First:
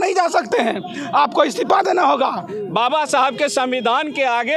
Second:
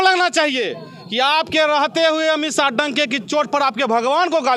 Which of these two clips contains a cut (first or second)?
first